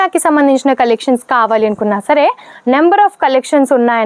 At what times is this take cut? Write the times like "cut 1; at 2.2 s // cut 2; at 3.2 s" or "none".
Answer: none

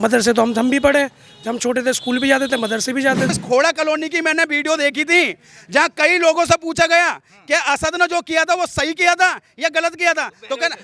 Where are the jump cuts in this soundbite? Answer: cut 1; at 3.4 s

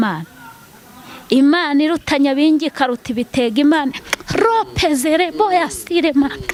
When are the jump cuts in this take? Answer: none

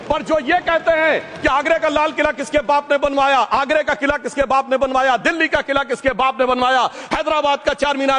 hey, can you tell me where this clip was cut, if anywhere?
none

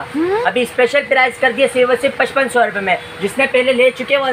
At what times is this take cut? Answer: none

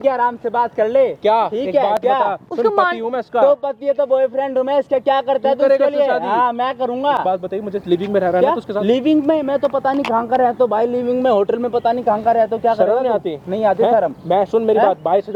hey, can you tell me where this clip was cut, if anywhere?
none

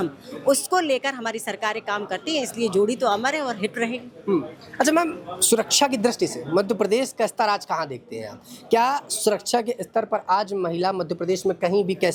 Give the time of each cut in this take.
none

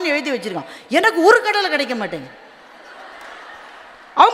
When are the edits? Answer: none

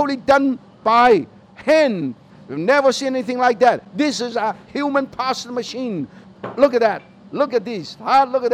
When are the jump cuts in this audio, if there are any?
cut 1; at 2.3 s // cut 2; at 6.3 s

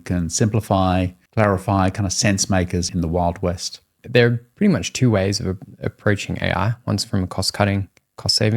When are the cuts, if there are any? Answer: cut 1; at 1.2 s // cut 2; at 2.9 s // cut 3; at 4.0 s

